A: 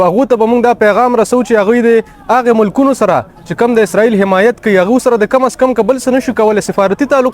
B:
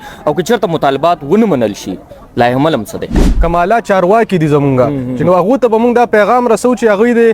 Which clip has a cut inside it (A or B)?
B